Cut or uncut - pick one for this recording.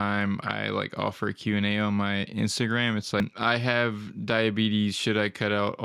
cut